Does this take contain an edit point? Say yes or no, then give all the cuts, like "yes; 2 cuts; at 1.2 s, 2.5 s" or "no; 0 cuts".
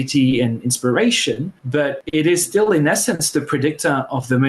yes; 1 cut; at 1.5 s